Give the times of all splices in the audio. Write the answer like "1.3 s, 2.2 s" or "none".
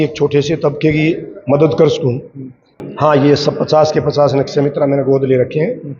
2.8 s